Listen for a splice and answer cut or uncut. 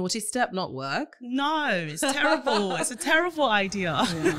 uncut